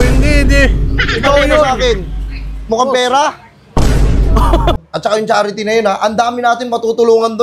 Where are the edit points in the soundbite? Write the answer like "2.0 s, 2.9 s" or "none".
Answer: 4.8 s